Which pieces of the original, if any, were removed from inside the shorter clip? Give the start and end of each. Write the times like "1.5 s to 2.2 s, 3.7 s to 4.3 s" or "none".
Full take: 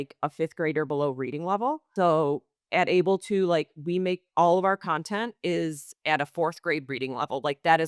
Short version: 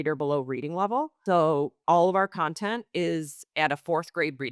2.5 s to 4.3 s